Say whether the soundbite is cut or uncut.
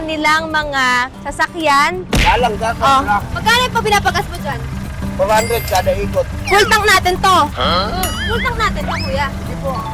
cut